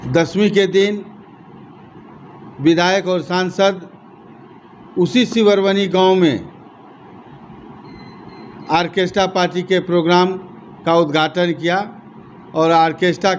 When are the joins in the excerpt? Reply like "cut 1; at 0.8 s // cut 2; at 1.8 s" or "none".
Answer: none